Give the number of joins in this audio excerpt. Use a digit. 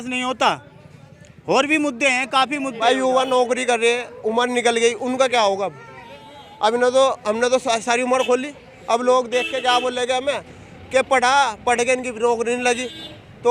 1